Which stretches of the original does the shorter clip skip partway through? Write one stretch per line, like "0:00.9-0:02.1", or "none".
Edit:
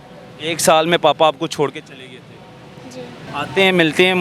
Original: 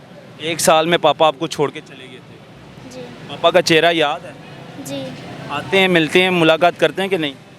0:03.3-0:05.4